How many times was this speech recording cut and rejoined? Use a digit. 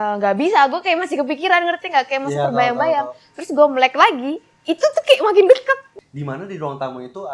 1